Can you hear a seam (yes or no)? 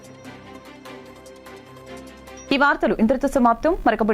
no